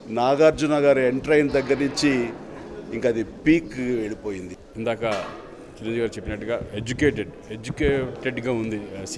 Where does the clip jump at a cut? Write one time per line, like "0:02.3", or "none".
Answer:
0:04.6

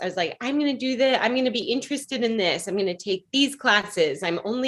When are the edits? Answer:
none

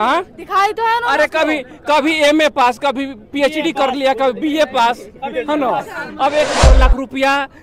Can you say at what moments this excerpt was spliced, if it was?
0:06.6

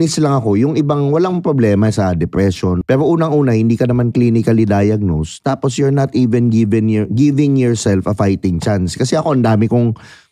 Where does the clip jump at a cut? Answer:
0:02.8

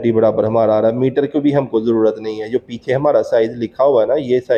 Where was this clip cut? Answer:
none

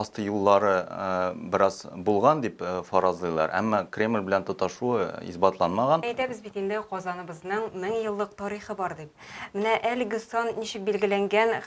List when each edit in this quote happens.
0:06.1

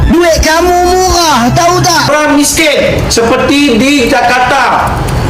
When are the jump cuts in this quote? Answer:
0:02.0

